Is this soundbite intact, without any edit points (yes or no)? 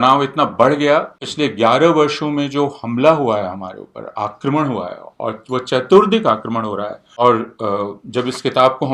no